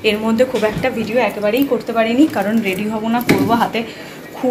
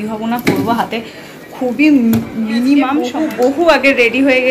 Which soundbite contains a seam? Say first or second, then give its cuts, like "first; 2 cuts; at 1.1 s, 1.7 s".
second; 1 cut; at 3.1 s